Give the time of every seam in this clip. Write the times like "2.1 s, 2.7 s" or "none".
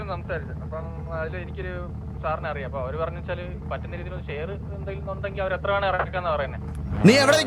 none